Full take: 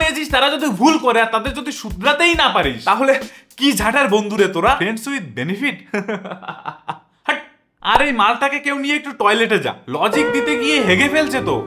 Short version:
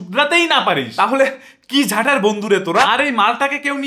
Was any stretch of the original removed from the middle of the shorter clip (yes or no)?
yes